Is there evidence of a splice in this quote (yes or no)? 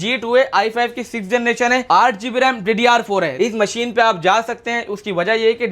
yes